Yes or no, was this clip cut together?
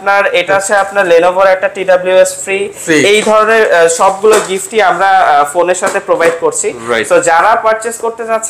no